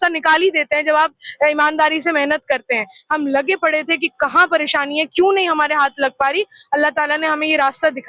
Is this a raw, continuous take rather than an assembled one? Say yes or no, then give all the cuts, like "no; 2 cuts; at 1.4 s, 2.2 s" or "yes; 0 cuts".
yes; 0 cuts